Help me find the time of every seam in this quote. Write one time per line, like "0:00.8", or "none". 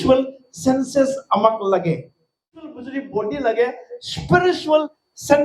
0:02.8